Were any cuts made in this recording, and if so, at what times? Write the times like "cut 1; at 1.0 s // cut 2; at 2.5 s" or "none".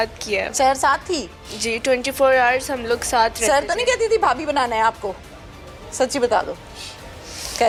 none